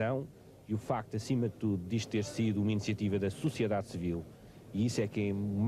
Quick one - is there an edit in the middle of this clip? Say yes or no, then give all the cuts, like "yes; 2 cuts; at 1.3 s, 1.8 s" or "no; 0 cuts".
no; 0 cuts